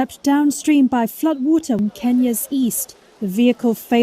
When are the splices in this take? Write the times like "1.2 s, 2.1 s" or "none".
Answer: 1.8 s